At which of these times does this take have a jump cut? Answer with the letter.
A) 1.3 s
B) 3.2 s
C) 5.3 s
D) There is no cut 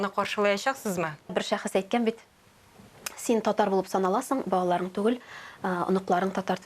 A